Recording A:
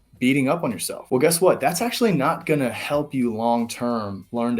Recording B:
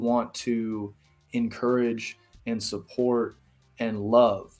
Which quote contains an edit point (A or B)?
A